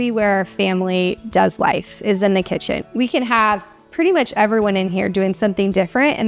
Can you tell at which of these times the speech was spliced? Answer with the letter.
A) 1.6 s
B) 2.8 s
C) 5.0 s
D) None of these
B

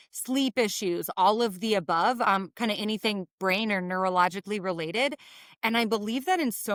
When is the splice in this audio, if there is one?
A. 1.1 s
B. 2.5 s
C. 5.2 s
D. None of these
D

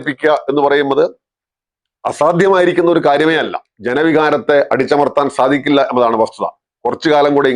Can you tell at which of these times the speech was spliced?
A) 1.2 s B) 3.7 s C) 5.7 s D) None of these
B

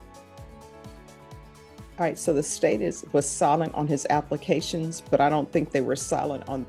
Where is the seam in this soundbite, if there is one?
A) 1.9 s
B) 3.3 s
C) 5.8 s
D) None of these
A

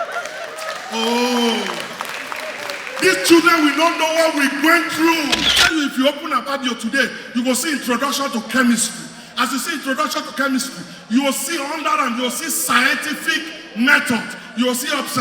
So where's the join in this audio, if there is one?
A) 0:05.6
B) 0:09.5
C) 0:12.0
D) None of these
A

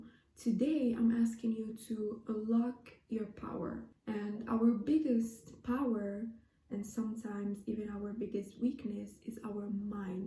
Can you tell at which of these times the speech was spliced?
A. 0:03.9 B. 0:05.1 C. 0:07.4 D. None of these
A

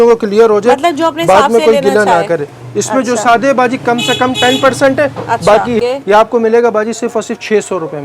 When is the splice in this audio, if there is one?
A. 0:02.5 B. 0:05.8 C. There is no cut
B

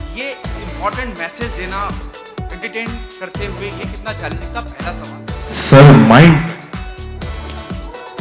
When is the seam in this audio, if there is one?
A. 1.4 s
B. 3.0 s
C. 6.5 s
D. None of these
C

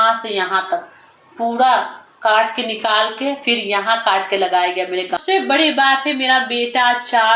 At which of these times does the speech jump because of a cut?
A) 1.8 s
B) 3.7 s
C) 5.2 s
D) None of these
C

